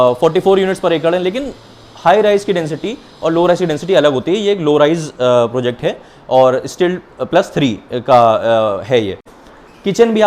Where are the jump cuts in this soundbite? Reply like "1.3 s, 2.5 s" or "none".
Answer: 9.3 s